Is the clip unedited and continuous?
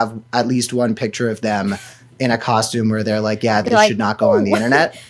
yes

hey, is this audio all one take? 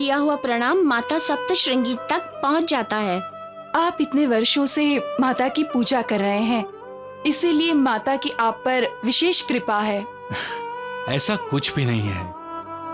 yes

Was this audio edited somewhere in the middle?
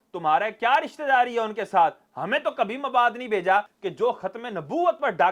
yes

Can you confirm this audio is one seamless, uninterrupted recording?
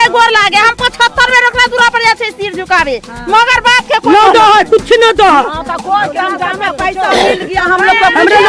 yes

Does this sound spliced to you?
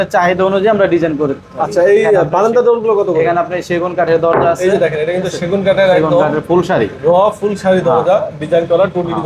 no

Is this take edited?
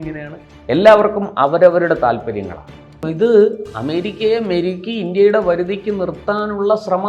yes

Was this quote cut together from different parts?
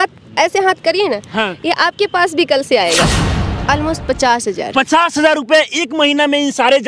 yes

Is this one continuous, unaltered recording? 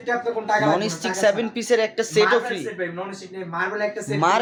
yes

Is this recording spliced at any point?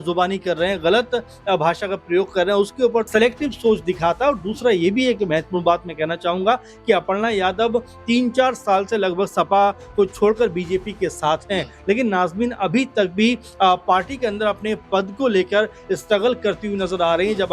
yes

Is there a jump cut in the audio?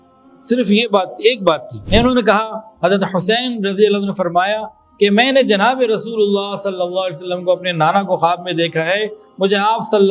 yes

